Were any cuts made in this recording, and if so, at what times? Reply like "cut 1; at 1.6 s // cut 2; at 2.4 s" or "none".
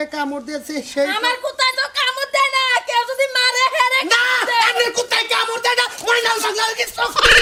none